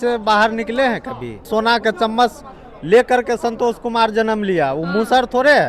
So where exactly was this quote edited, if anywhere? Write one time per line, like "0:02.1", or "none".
0:01.5